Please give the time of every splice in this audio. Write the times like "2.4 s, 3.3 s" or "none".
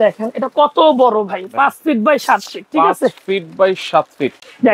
none